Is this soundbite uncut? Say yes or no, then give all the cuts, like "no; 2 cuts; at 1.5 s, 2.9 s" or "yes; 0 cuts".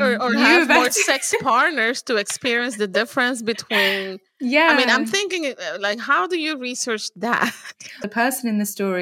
no; 1 cut; at 8.0 s